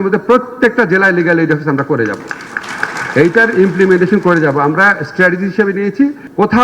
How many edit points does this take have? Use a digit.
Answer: 0